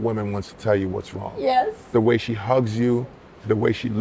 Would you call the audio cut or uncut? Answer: uncut